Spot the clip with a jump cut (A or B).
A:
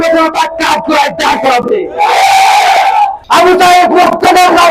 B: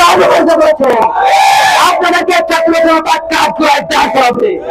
A